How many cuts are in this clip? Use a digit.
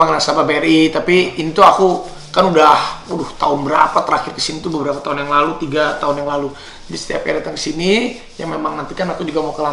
0